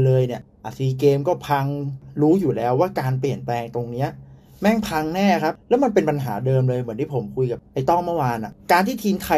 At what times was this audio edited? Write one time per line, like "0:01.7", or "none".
0:02.0
0:05.6
0:08.5